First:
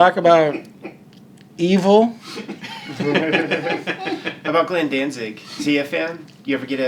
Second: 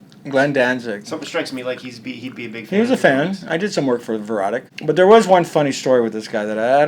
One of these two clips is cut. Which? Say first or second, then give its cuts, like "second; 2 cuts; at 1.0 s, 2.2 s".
second; 1 cut; at 4.7 s